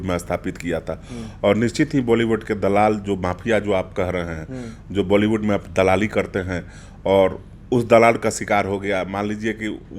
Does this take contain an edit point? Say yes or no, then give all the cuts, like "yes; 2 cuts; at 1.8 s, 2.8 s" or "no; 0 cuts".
no; 0 cuts